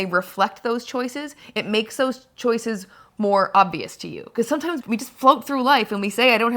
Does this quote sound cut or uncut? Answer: cut